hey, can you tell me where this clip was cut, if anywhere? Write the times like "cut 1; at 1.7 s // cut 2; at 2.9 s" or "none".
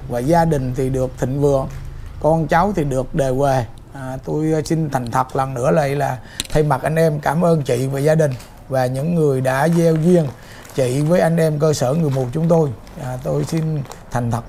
none